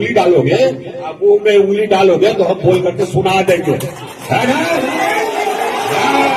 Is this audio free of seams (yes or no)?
yes